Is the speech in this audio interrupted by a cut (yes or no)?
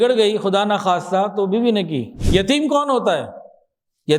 yes